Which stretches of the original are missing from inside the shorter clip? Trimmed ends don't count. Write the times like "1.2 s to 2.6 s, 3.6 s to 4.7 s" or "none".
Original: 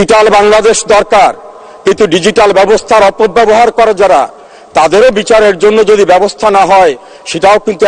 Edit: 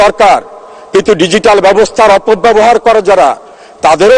none